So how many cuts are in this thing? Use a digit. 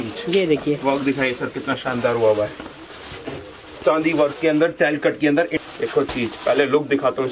1